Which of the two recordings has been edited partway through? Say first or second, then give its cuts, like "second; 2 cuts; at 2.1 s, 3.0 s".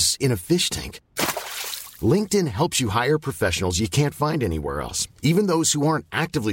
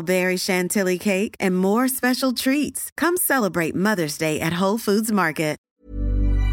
second; 1 cut; at 5.6 s